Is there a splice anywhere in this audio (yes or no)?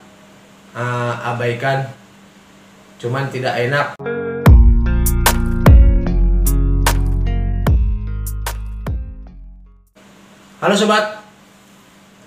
yes